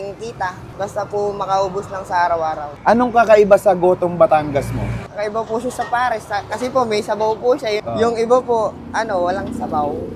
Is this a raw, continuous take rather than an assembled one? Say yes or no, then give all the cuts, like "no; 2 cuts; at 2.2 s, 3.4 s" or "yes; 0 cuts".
no; 2 cuts; at 2.7 s, 7.8 s